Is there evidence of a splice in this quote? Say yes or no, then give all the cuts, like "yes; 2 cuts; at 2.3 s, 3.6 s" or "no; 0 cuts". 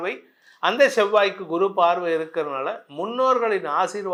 no; 0 cuts